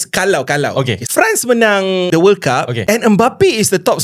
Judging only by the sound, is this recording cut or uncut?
cut